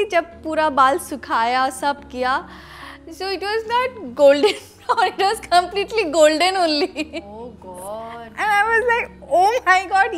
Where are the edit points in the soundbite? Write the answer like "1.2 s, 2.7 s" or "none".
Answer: none